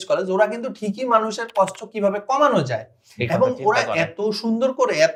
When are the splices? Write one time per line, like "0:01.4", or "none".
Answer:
none